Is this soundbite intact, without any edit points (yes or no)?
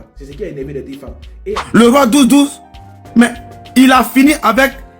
no